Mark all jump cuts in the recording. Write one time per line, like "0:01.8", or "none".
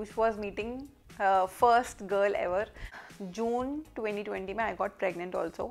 0:03.0